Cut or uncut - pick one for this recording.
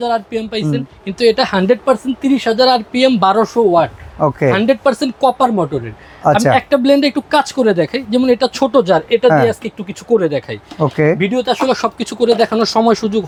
uncut